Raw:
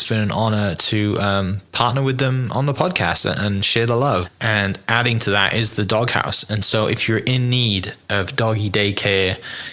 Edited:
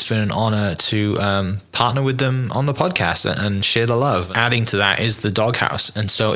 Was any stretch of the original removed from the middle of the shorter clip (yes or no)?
yes